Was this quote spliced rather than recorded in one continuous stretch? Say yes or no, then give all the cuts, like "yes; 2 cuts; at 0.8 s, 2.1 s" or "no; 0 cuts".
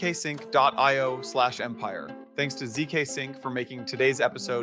no; 0 cuts